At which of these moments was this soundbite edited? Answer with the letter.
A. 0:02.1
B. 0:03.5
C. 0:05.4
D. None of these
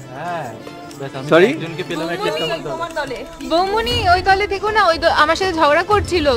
D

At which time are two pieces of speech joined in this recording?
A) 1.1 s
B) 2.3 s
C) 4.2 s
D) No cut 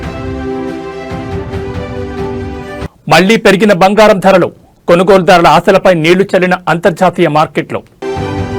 D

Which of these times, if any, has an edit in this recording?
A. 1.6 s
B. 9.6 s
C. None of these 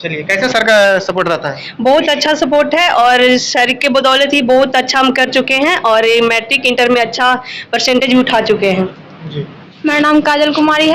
B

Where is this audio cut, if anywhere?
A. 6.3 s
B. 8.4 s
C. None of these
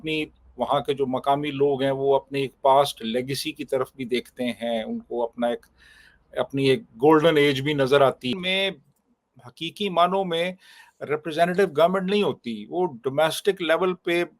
B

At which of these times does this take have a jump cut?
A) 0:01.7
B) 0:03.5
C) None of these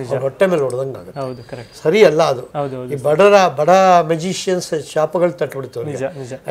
A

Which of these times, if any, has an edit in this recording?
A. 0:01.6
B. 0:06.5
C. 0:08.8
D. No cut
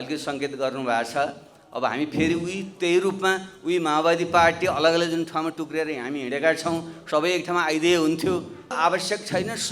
C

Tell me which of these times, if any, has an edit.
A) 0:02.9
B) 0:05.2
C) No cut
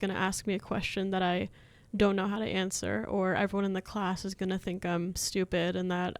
B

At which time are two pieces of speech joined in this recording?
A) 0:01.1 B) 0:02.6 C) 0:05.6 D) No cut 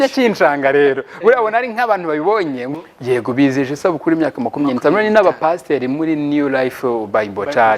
B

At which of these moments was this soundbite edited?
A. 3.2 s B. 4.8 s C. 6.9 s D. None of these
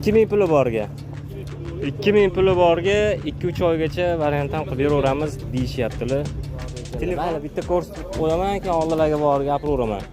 C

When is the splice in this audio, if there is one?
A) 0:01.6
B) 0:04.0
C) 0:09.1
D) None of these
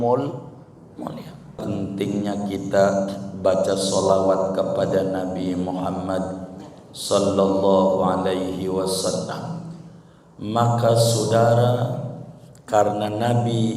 A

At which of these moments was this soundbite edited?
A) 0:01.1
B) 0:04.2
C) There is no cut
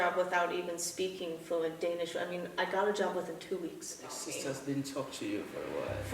B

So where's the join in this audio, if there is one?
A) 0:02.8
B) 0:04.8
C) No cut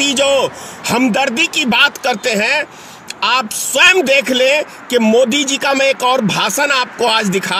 C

